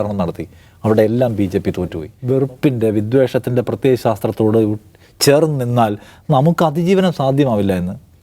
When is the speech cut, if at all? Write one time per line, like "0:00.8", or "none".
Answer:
0:02.1